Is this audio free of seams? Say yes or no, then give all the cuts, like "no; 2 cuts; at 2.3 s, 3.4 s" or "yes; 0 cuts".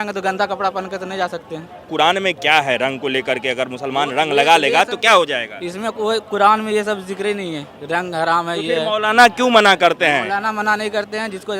no; 1 cut; at 1.8 s